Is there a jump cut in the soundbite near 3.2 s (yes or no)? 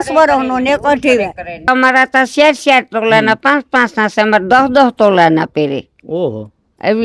no